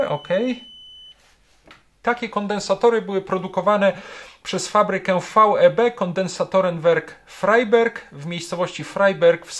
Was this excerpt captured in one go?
no; 1 cut; at 1.9 s

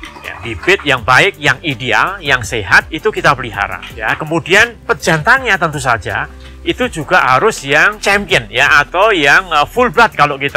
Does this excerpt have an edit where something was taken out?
no; 0 cuts

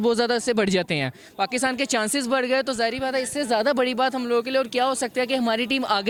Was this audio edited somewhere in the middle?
no; 0 cuts

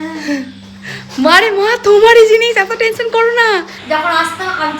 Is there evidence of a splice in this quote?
yes; 1 cut; at 3.7 s

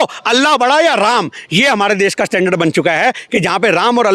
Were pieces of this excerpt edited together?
no; 0 cuts

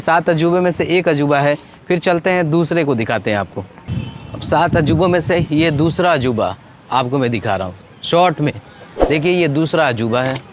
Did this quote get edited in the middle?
no; 0 cuts

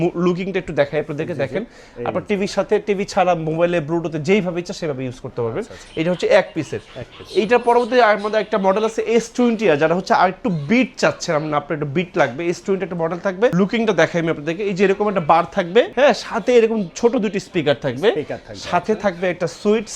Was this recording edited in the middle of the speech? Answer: no; 0 cuts

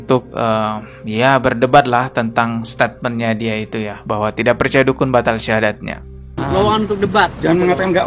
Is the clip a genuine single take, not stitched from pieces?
yes; 0 cuts

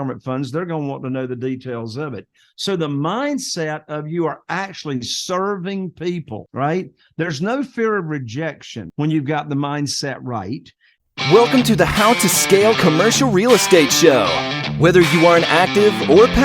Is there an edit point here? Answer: yes; 1 cut; at 10.9 s

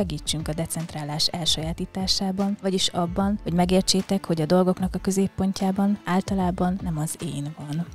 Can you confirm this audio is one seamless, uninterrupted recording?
yes; 0 cuts

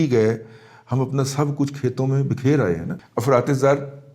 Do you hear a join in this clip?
yes; 1 cut; at 2.9 s

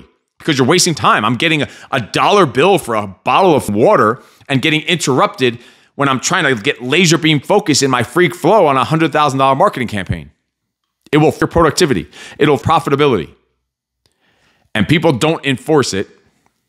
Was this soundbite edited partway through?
yes; 4 cuts; at 1.0 s, 3.7 s, 11.4 s, 12.6 s

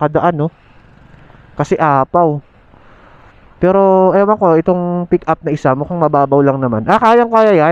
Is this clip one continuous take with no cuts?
yes; 0 cuts

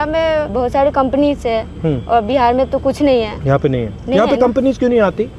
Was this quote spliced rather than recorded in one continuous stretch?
no; 0 cuts

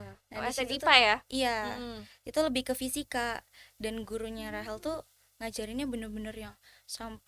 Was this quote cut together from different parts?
no; 0 cuts

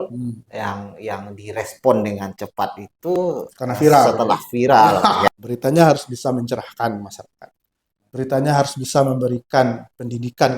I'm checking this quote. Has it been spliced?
yes; 1 cut; at 5.3 s

